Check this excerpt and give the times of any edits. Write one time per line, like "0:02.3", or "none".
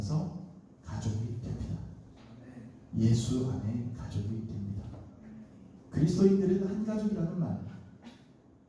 0:05.7